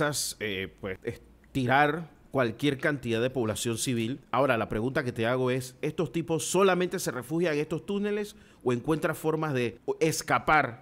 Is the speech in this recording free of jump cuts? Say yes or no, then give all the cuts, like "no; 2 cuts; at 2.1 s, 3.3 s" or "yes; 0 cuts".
no; 3 cuts; at 1.0 s, 4.2 s, 9.8 s